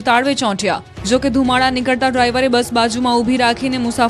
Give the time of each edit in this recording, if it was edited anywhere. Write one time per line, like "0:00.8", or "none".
0:02.4

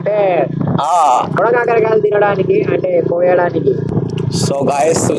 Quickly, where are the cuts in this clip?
0:01.4
0:03.9

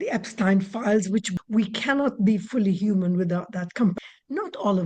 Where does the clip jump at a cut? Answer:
0:01.3
0:03.9

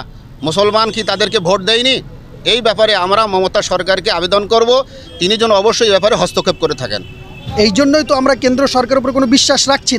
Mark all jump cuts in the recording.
0:07.4

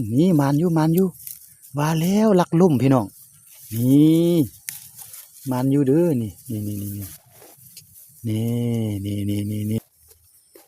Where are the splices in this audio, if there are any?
0:09.8

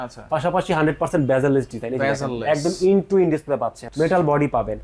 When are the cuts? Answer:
0:03.8

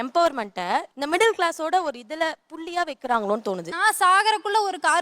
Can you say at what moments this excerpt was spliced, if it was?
0:00.9
0:03.7

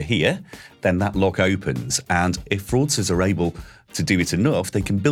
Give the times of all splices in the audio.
0:02.4

